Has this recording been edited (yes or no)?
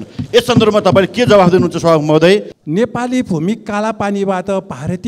yes